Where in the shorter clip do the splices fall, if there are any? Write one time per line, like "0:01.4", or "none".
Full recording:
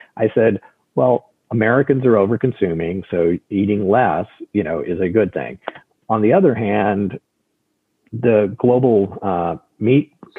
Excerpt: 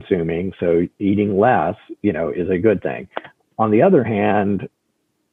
none